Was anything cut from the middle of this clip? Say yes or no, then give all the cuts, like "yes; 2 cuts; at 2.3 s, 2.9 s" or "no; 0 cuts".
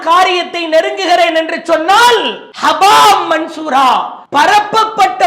yes; 1 cut; at 4.2 s